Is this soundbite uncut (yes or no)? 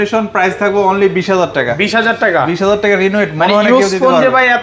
yes